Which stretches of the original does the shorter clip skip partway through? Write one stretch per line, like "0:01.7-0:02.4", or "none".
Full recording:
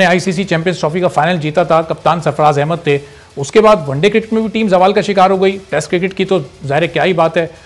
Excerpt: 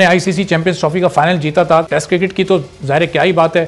0:01.9-0:05.7